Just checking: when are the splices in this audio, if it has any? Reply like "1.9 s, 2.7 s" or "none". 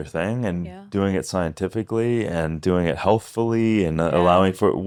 none